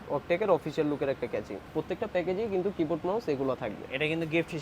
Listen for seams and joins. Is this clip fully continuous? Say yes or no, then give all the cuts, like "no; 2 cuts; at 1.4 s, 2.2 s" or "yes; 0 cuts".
no; 1 cut; at 1.7 s